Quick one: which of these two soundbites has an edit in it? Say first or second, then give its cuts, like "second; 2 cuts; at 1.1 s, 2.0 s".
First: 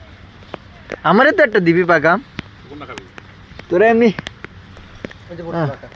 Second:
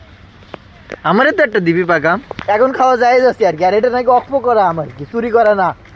second; 1 cut; at 2.3 s